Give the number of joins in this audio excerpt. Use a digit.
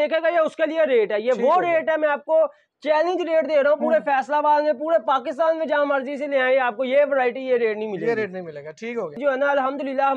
1